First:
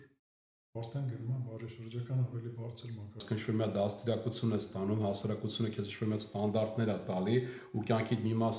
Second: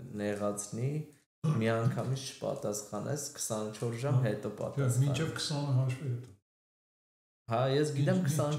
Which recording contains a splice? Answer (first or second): first